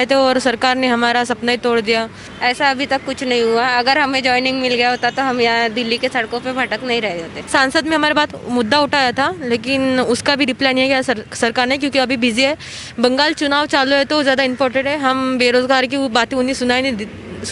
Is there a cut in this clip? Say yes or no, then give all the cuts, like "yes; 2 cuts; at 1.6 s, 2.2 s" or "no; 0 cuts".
yes; 2 cuts; at 2.2 s, 7.3 s